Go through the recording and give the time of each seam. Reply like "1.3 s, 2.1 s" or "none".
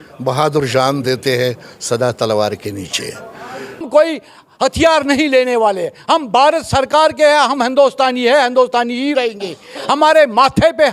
3.9 s